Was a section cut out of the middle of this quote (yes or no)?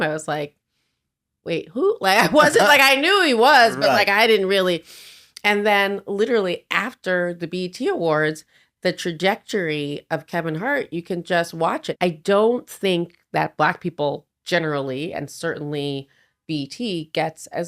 yes